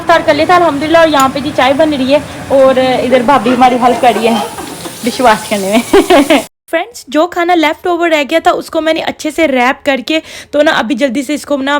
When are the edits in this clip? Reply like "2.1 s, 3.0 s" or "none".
none